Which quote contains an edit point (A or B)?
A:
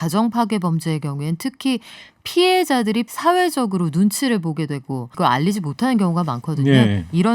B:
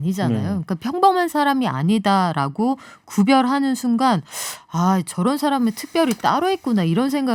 A